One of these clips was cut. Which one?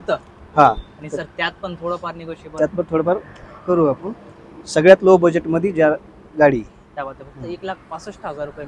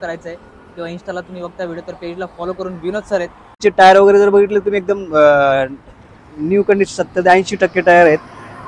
second; 1 cut; at 3.6 s

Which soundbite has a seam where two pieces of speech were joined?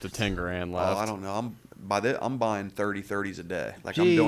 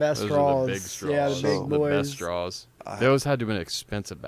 second; 1 cut; at 2.8 s

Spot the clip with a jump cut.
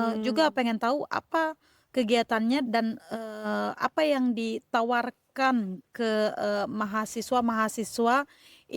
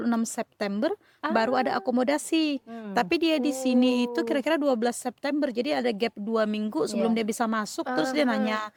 first; 1 cut; at 2.6 s

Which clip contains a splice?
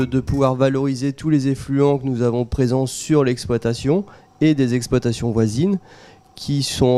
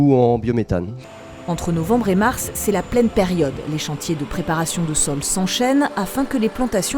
second; 1 cut; at 1.0 s

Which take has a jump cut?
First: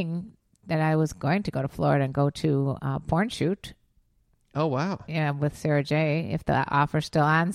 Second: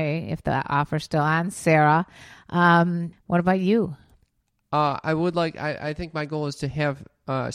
second; 1 cut; at 3.1 s

